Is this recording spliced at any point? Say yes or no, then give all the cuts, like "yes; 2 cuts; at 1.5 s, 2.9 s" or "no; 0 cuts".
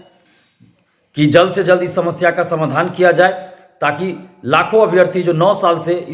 no; 0 cuts